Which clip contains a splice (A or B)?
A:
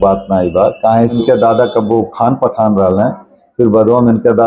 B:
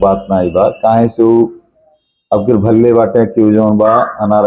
A